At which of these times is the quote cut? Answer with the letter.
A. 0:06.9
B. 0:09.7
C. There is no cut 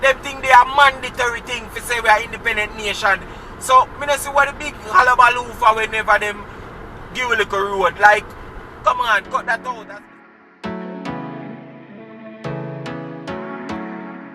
B